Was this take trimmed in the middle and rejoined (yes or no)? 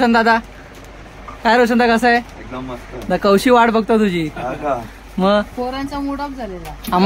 no